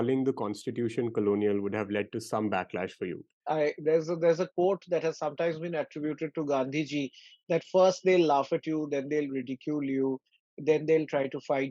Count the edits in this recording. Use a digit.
1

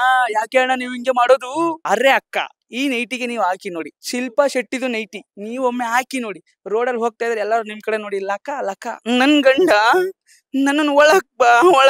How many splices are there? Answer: 3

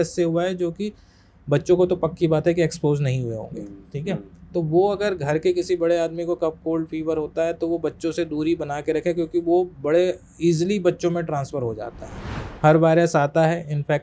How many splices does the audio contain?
1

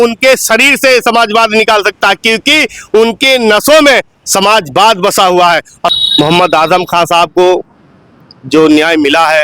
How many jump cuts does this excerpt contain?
1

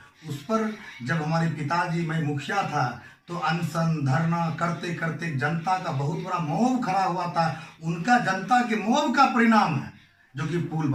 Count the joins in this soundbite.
0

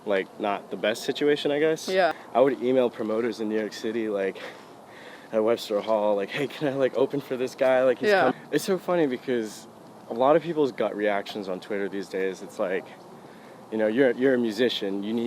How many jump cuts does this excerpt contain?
2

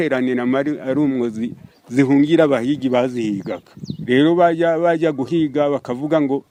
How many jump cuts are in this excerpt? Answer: 0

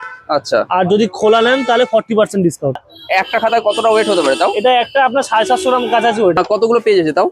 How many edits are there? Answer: 2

